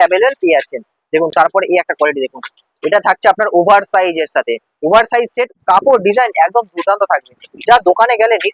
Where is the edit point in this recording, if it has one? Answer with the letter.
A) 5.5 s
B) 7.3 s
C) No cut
A